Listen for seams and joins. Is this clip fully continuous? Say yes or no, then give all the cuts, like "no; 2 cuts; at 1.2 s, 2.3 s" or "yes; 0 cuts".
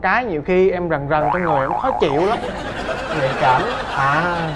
yes; 0 cuts